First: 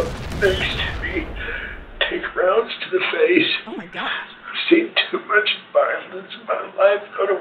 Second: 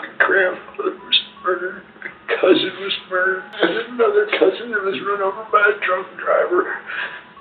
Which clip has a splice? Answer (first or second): second